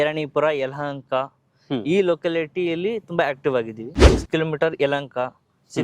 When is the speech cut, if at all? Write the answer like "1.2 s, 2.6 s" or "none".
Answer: 4.0 s

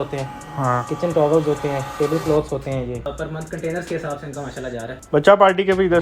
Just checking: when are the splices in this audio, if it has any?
3.1 s, 4.9 s

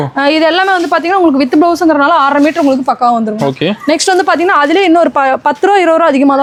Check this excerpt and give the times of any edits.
none

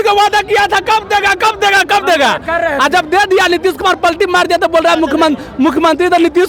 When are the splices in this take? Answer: none

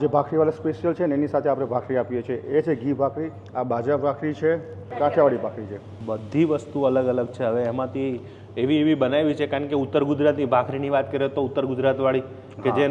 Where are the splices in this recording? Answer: none

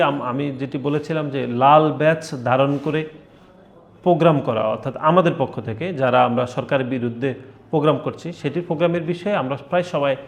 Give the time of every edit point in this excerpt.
none

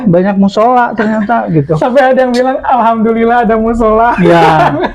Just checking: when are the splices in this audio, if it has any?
none

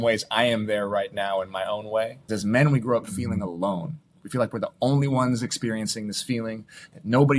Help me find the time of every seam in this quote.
2.2 s

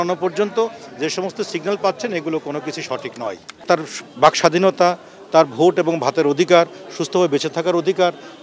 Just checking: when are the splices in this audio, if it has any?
3.6 s

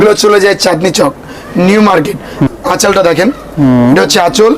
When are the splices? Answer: 2.5 s

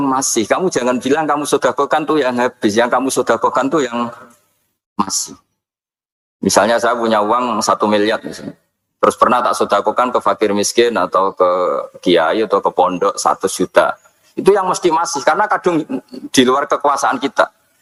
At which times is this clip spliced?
none

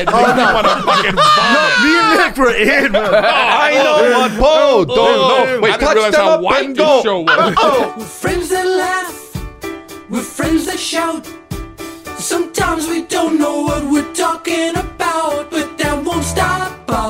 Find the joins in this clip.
7.8 s

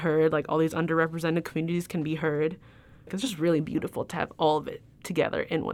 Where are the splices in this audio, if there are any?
none

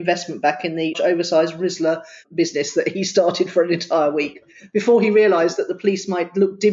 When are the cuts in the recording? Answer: 1.0 s, 2.2 s

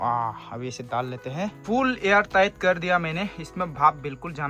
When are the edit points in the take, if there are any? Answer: 1.6 s

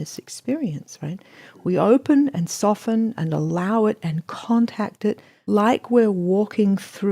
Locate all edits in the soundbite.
5.3 s

